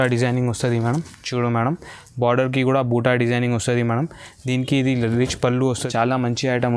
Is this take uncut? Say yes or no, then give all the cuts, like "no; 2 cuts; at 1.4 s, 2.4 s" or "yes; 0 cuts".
no; 1 cut; at 5.9 s